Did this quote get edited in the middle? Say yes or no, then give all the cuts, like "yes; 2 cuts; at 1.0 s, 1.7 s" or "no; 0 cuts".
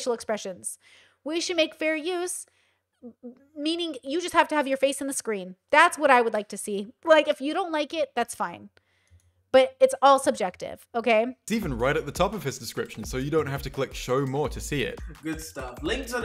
yes; 1 cut; at 11.4 s